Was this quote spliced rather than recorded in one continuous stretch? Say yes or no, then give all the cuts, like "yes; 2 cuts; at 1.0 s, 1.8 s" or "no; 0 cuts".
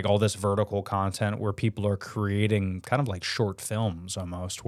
no; 0 cuts